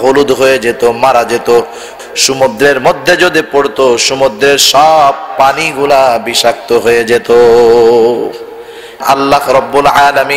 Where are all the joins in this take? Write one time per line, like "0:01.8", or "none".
0:02.0
0:09.0